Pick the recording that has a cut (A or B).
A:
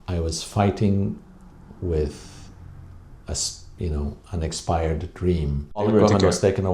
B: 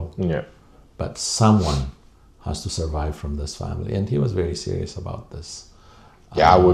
A